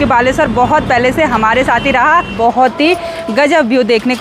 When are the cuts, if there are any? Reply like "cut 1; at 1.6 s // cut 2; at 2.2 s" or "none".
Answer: cut 1; at 2.3 s